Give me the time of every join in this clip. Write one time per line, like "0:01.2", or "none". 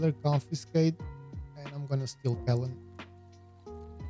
0:02.8